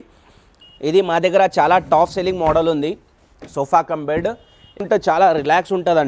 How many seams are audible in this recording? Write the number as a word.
one